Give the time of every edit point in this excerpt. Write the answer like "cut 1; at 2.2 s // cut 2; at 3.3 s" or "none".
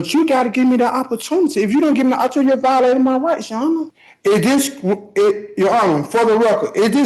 cut 1; at 3.6 s